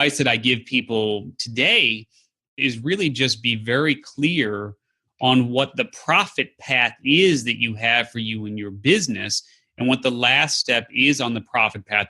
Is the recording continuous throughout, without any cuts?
no; 1 cut; at 2.5 s

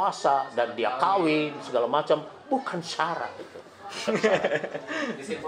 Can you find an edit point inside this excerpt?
no; 0 cuts

